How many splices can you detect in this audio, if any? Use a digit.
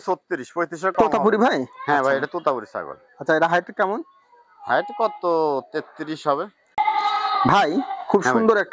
2